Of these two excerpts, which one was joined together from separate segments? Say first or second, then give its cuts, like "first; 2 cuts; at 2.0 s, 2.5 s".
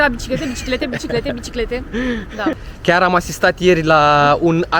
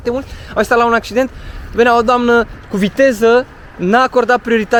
first; 1 cut; at 2.7 s